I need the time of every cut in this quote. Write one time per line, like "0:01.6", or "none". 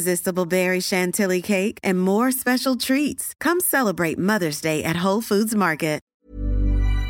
0:06.1